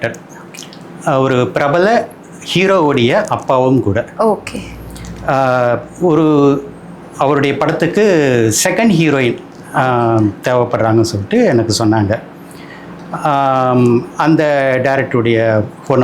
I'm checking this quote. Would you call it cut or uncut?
uncut